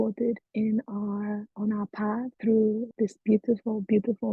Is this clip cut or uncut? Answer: cut